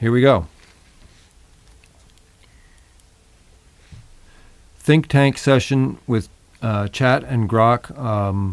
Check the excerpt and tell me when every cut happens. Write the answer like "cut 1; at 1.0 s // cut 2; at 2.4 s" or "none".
none